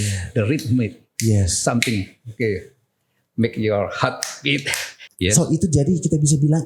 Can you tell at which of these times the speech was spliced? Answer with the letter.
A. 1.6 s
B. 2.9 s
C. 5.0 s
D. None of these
C